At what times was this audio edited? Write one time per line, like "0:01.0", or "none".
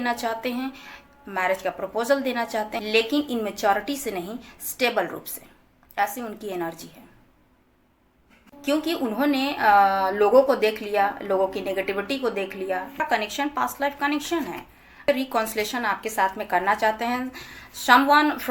0:02.8
0:13.0
0:15.1